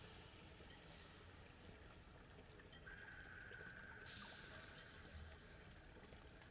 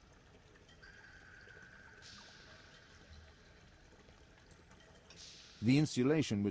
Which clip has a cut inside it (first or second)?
second